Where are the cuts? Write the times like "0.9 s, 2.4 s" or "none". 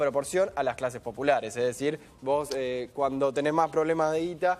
1.2 s